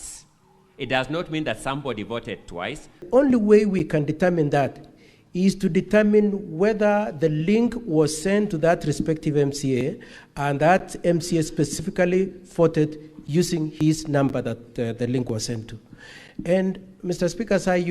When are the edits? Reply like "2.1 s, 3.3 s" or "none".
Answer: 3.0 s